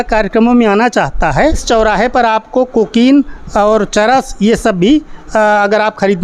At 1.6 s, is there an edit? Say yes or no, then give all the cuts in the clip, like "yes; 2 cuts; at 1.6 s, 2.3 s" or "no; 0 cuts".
yes; 1 cut; at 1.6 s